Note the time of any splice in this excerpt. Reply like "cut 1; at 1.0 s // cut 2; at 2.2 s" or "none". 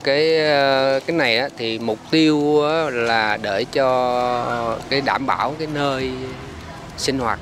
none